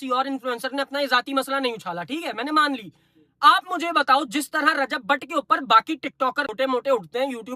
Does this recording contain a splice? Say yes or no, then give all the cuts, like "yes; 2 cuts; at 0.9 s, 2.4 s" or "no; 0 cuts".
yes; 1 cut; at 6.5 s